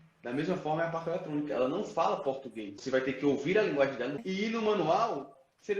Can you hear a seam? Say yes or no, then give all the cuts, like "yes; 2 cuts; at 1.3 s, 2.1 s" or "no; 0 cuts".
yes; 2 cuts; at 2.7 s, 4.2 s